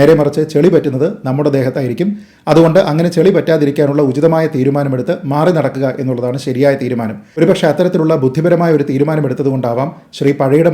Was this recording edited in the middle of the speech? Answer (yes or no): yes